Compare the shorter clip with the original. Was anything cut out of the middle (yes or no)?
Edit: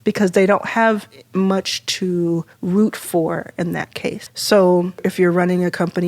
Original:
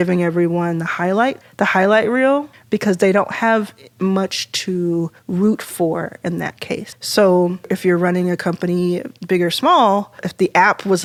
no